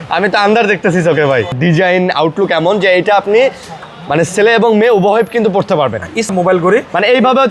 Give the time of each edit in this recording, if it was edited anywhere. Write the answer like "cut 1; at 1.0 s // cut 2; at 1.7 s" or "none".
cut 1; at 1.6 s // cut 2; at 6.3 s